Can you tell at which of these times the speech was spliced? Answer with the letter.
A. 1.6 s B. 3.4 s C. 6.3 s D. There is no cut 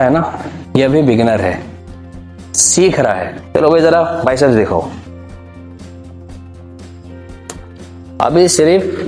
B